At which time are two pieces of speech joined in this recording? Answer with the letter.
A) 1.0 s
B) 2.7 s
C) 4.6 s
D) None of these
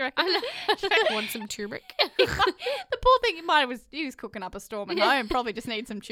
A